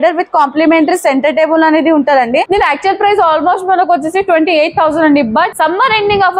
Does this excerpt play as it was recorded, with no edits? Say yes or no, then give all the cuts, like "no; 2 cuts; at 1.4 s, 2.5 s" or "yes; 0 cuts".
no; 2 cuts; at 2.5 s, 5.5 s